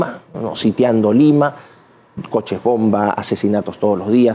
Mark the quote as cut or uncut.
uncut